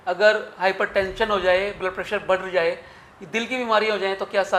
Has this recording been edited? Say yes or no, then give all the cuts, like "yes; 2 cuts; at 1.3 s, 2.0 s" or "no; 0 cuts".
no; 0 cuts